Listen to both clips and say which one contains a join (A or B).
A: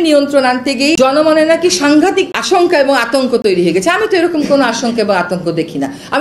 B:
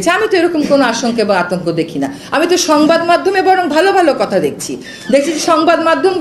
A